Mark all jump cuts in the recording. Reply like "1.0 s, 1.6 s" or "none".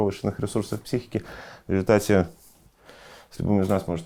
none